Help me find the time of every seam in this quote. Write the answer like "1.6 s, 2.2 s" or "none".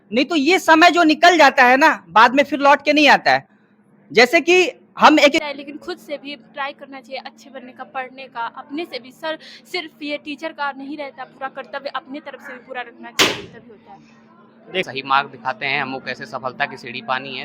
5.4 s, 14.8 s

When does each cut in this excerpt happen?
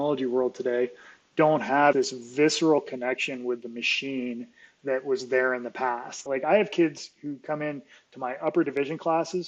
1.9 s, 6.2 s

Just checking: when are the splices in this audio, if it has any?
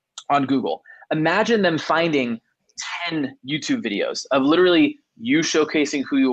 none

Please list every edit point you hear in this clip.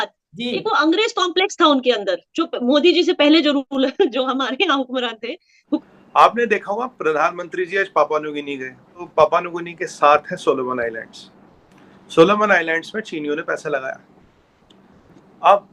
5.8 s, 9.0 s

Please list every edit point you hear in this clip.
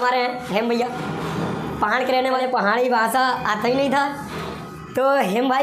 none

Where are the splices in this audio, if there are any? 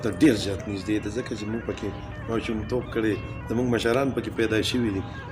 none

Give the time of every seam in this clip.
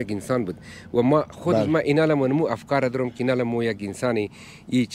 none

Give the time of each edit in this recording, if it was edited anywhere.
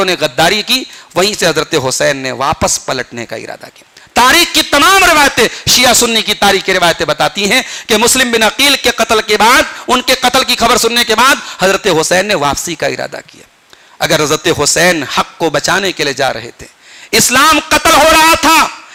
none

